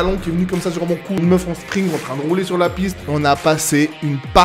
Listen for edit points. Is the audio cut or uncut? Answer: cut